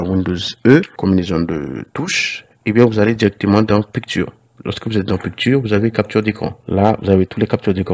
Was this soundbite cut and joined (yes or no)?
yes